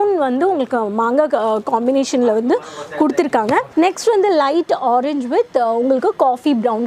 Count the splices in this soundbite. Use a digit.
1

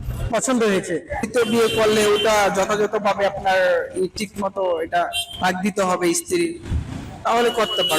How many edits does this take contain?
1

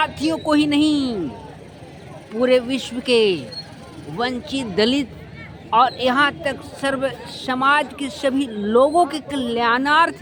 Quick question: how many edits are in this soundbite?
0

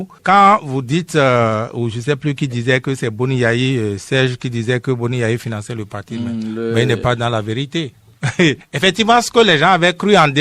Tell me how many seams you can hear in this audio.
0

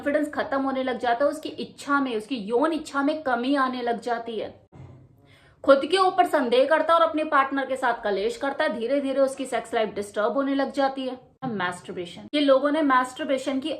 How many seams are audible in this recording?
1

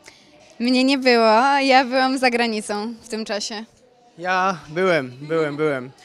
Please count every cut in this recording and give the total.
0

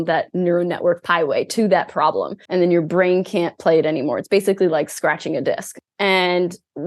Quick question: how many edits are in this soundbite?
3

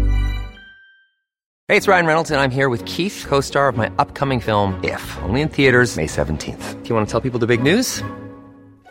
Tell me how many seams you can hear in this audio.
1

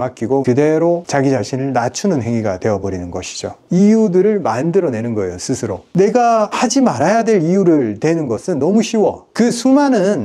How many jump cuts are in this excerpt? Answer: 2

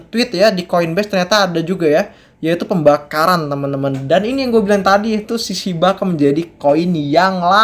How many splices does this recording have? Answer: 0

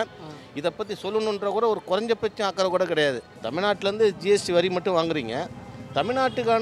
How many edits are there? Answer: 1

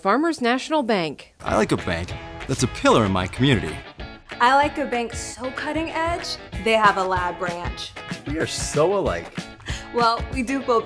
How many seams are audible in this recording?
0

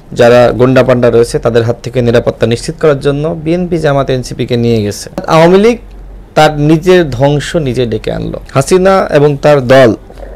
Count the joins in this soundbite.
2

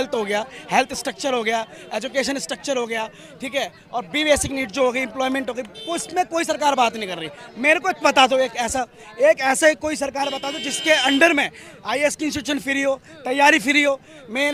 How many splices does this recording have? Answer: 0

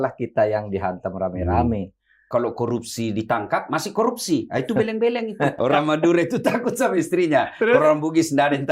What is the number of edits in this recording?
2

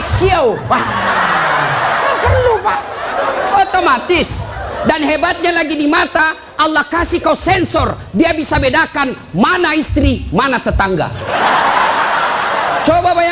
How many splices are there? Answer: 0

